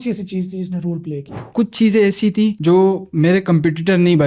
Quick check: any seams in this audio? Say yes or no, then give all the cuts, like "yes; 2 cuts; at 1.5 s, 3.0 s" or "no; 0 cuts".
yes; 1 cut; at 1.4 s